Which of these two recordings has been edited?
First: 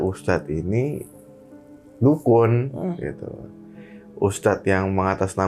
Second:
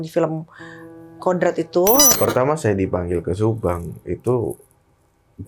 second; 1 cut; at 2.1 s

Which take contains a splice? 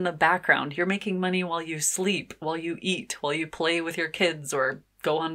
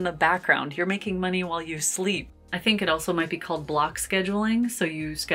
second; 1 cut; at 2.3 s

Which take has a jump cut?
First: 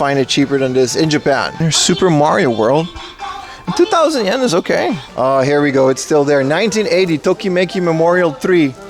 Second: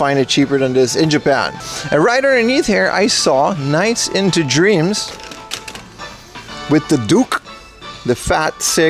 first; 2 cuts; at 1.6 s, 5.0 s

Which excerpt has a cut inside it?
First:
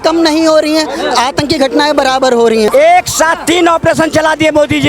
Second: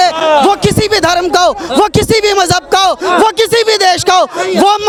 first; 1 cut; at 2.7 s

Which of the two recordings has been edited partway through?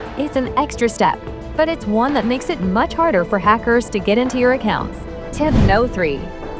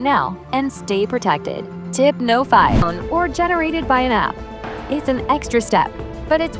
second; 1 cut; at 2.9 s

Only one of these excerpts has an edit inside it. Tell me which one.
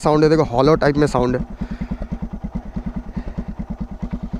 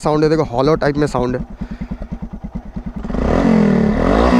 second; 1 cut; at 3.0 s

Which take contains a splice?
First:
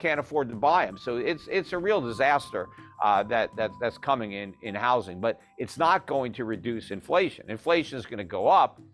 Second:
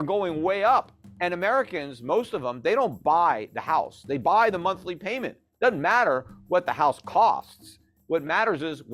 second; 1 cut; at 1.0 s

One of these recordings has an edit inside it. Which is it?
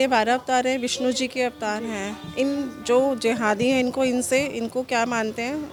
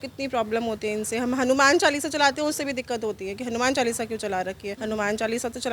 second; 1 cut; at 4.7 s

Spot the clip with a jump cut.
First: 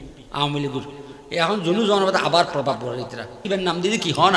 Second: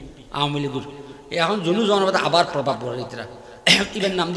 first; 1 cut; at 3.4 s

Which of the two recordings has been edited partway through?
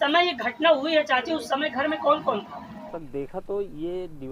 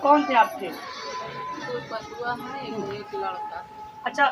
first; 1 cut; at 3.0 s

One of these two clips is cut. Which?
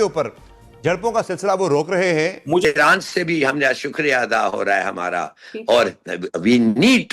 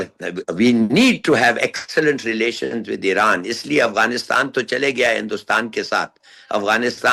first; 1 cut; at 2.6 s

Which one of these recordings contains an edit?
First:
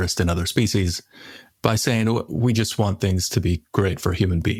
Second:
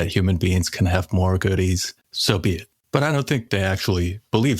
second; 2 cuts; at 2.4 s, 3.4 s

